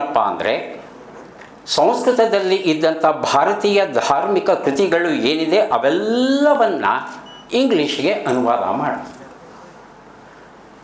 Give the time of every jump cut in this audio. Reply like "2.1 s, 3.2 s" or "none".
none